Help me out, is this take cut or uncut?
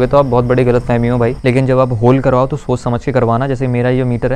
cut